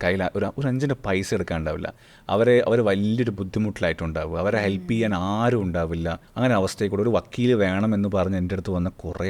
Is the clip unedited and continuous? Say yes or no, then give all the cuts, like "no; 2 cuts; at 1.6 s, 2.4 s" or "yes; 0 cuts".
no; 1 cut; at 6.2 s